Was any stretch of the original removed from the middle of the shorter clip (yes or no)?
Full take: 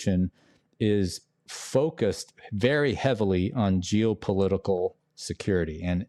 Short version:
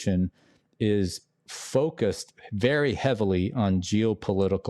no